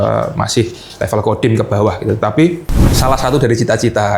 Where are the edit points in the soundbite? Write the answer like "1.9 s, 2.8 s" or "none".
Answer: 2.9 s